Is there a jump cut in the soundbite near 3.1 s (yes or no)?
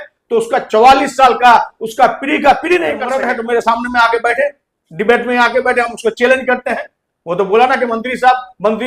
yes